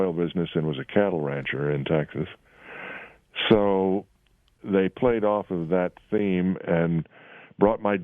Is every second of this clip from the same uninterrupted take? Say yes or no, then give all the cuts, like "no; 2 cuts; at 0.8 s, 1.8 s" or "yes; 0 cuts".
no; 1 cut; at 4.6 s